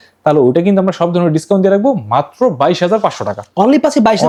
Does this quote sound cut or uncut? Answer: uncut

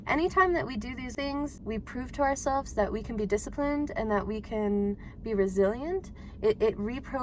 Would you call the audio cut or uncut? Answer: cut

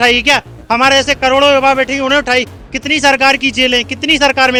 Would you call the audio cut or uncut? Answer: uncut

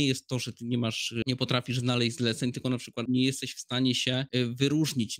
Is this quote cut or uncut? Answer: cut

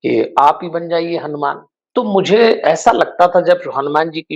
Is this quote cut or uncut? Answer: cut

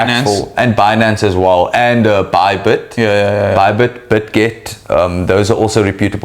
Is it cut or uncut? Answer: uncut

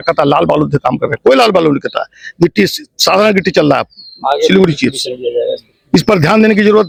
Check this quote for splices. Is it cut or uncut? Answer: uncut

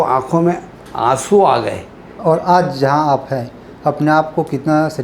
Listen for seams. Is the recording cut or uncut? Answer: cut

